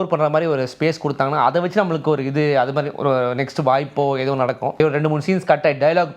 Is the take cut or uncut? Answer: cut